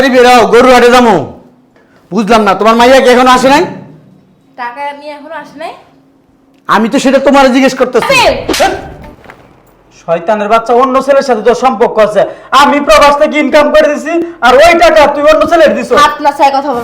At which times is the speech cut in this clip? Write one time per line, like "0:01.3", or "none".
0:08.0